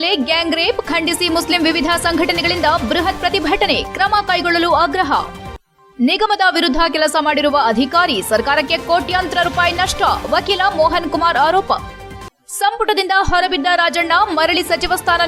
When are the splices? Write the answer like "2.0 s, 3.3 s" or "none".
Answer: none